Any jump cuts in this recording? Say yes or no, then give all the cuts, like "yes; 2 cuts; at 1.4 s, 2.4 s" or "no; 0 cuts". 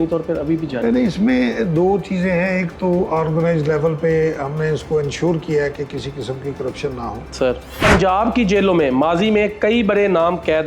yes; 1 cut; at 7.3 s